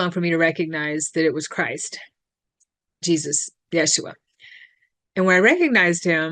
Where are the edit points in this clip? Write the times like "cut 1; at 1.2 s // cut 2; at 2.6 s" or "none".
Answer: none